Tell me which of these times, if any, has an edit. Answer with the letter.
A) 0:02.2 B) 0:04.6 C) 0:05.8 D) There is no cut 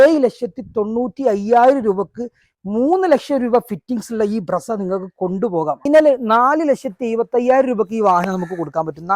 C